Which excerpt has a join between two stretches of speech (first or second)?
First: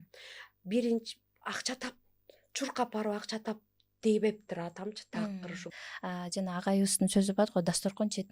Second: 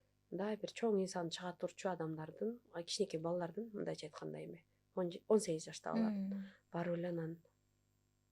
first